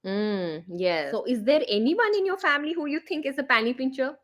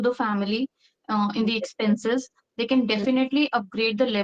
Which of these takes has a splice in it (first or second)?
first